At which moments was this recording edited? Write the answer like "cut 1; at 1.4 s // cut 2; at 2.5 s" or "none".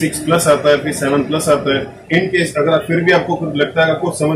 cut 1; at 1.9 s